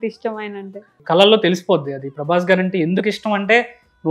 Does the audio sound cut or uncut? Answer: cut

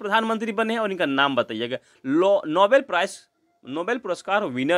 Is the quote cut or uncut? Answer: uncut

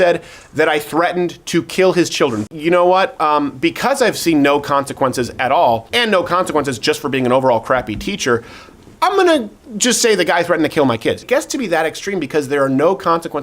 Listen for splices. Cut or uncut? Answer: cut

